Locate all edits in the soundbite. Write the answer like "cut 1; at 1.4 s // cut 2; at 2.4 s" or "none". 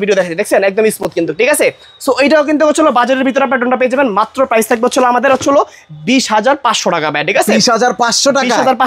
none